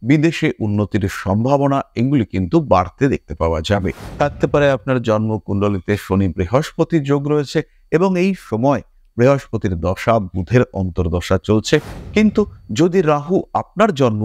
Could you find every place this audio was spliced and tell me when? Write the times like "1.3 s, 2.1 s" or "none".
4.0 s, 11.9 s